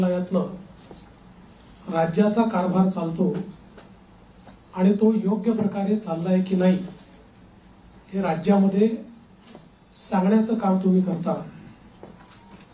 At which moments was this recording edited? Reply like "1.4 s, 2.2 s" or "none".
6.5 s